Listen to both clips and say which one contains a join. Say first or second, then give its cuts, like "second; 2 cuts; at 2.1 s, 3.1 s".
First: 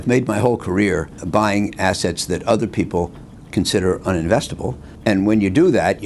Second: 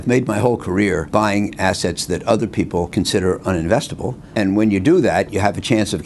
second; 3 cuts; at 1.1 s, 2.9 s, 4.2 s